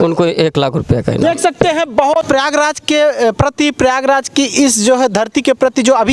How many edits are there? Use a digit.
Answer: 1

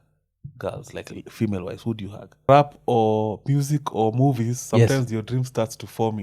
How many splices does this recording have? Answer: 1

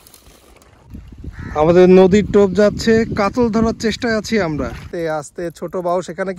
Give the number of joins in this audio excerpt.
2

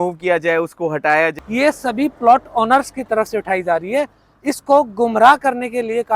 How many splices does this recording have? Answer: 1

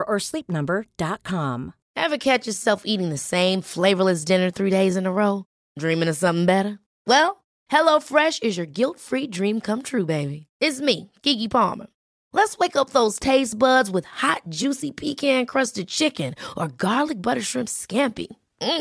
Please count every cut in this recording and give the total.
1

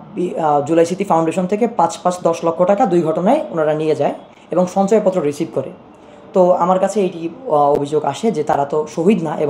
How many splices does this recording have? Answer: 0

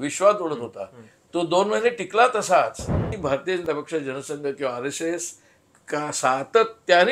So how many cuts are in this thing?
1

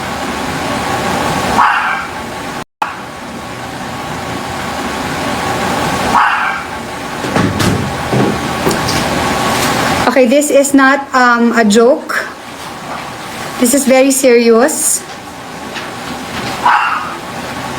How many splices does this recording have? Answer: 1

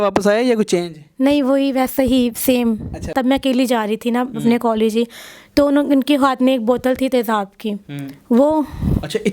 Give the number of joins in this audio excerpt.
1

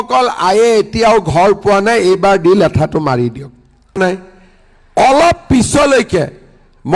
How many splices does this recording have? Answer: 1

